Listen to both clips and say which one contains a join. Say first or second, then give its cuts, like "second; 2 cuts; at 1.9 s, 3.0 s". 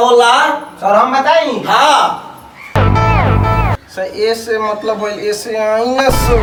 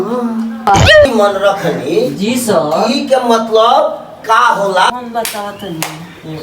second; 1 cut; at 1.1 s